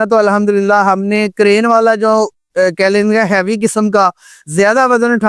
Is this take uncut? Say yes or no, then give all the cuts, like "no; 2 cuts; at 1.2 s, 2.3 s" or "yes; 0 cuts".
yes; 0 cuts